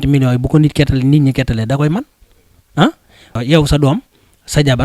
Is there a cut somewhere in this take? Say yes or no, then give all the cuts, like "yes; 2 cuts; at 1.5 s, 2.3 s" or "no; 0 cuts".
yes; 1 cut; at 3.4 s